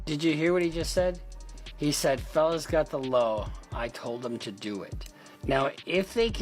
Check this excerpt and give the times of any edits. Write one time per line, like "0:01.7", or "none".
none

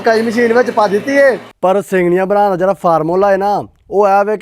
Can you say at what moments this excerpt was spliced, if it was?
0:01.5

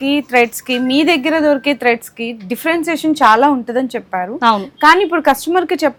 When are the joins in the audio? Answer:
none

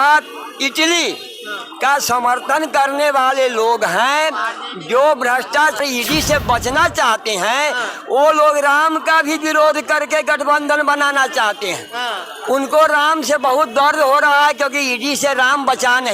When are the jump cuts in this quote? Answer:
0:05.8

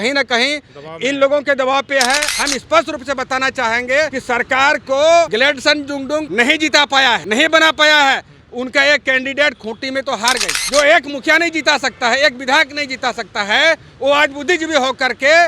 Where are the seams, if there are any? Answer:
0:02.3
0:10.5

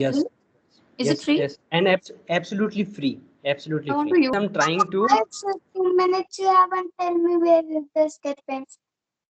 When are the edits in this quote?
0:04.3

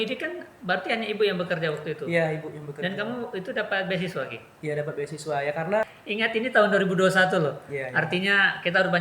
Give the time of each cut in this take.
0:05.8

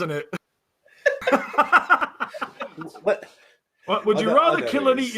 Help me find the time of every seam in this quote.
0:03.4

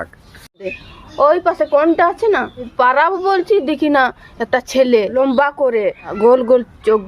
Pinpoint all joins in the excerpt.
0:00.8
0:02.7
0:05.1
0:06.0

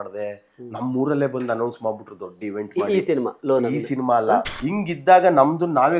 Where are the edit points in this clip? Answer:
0:04.5

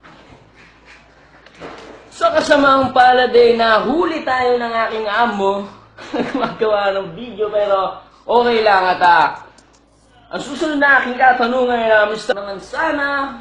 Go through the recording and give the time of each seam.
none

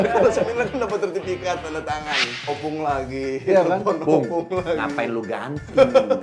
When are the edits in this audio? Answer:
0:02.5

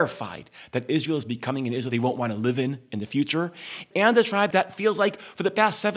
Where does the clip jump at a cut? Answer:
0:01.9
0:03.9
0:04.5

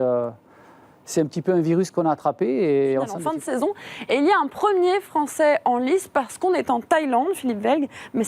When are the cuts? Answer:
0:03.2

